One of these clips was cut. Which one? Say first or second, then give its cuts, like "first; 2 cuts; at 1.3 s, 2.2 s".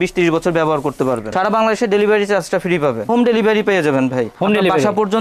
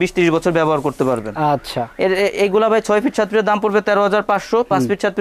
first; 2 cuts; at 1.3 s, 3.1 s